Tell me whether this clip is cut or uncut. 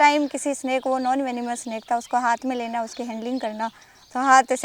uncut